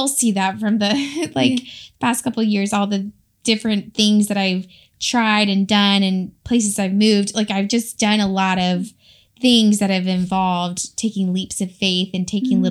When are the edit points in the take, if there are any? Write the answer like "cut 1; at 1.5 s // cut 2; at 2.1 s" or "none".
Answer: none